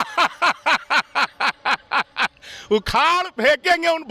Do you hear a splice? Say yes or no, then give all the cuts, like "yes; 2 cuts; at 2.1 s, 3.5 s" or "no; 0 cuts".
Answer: no; 0 cuts